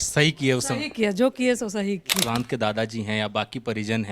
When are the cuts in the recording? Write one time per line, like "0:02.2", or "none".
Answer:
0:02.2